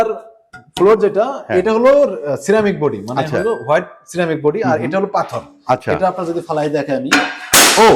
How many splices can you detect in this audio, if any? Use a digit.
0